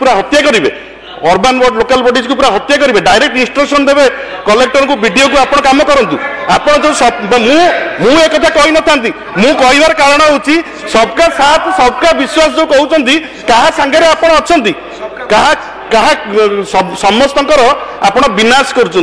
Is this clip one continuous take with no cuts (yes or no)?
yes